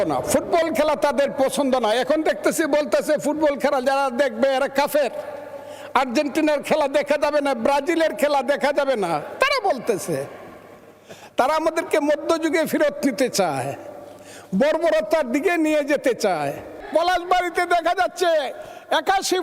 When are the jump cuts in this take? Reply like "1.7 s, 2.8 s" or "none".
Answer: 16.8 s

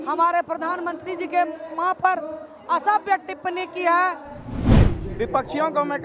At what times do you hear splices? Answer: 4.8 s

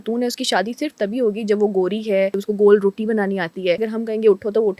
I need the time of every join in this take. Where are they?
2.4 s, 3.9 s

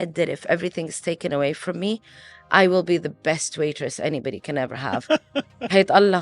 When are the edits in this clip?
none

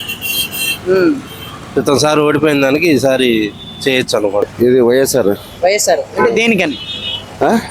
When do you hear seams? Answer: 4.5 s

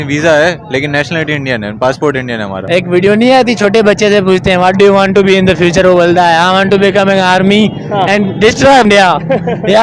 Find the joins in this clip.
2.6 s, 8.9 s

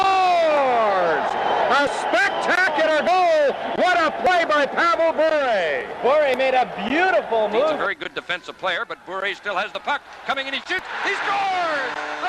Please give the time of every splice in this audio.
7.8 s

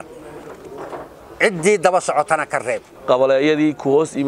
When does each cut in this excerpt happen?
2.9 s

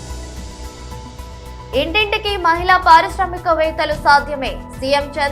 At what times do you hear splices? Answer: 1.4 s

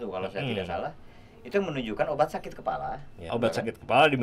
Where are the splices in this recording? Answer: 3.3 s

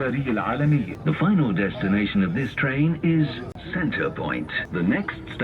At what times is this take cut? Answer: 0.9 s, 3.6 s, 4.6 s

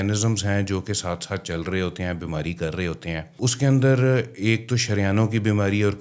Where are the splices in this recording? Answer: 3.3 s

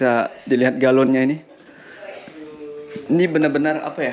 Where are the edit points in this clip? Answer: none

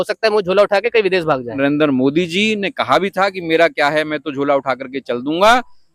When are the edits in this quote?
1.5 s

